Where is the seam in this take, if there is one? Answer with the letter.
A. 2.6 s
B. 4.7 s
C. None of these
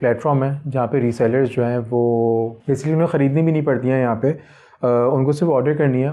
A